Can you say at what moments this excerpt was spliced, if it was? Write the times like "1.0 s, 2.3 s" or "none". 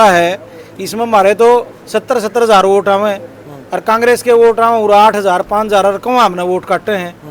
none